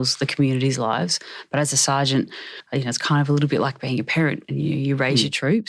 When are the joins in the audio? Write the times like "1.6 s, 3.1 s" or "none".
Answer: 2.3 s